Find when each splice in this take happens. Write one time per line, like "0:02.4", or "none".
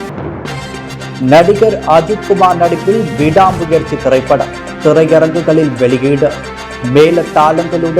0:01.2